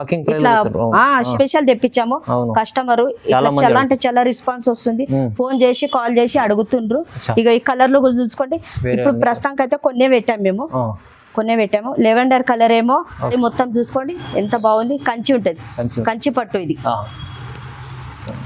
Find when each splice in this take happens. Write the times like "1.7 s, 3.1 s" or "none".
1.3 s, 13.3 s